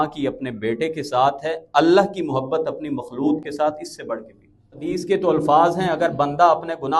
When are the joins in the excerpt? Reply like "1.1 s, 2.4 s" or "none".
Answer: 4.9 s